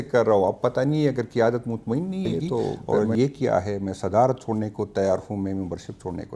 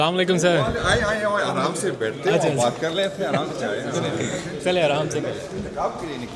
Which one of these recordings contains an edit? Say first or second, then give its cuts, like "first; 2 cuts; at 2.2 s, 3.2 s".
first; 1 cut; at 2.9 s